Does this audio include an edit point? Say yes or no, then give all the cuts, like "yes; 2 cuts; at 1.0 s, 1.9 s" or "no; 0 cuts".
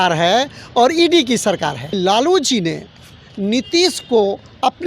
yes; 1 cut; at 1.8 s